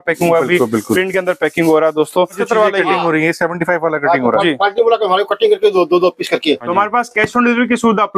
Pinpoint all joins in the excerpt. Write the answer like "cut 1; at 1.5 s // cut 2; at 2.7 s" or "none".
cut 1; at 2.4 s // cut 2; at 6.7 s

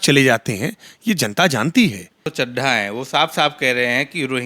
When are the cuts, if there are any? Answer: cut 1; at 2.3 s

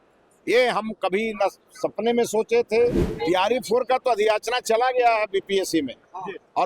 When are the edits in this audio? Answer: cut 1; at 3.1 s

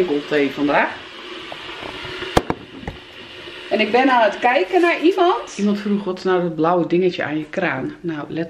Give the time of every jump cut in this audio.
cut 1; at 5.5 s

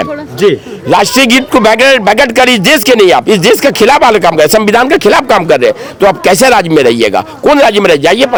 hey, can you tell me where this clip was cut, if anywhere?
none

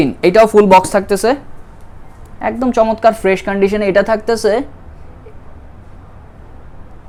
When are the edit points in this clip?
none

